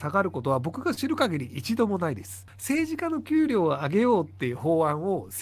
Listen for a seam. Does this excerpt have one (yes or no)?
yes